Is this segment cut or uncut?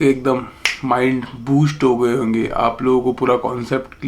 uncut